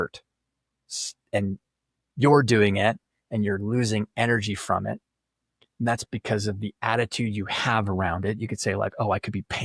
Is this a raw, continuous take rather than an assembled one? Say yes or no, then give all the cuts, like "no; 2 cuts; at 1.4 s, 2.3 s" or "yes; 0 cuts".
yes; 0 cuts